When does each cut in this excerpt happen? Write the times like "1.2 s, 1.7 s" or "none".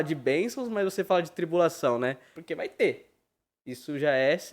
2.4 s